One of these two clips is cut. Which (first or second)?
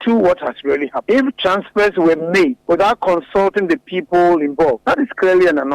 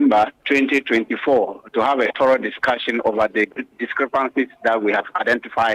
first